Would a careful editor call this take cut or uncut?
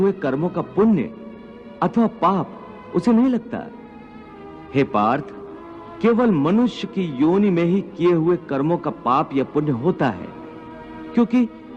uncut